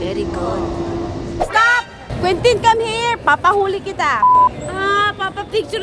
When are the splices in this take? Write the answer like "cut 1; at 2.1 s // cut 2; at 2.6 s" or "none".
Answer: cut 1; at 1.4 s